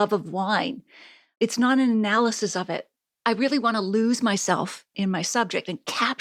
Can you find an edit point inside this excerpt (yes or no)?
no